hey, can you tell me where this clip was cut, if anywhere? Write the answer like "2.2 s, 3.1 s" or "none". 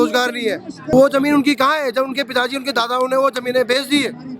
0.9 s

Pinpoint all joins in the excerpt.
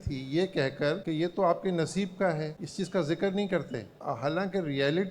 1.0 s, 2.6 s, 3.9 s

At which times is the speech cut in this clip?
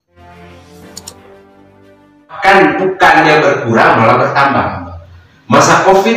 2.3 s

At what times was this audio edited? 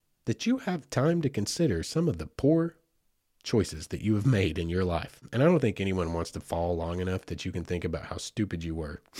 5.2 s

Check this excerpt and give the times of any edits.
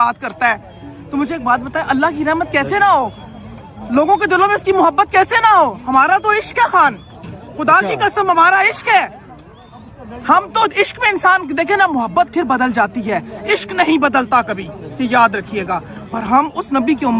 none

